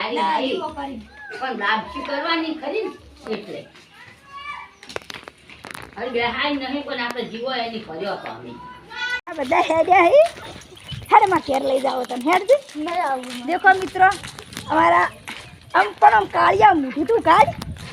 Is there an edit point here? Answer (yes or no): yes